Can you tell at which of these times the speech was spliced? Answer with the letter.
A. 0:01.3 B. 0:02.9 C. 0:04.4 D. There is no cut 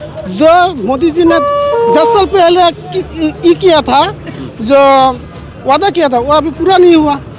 D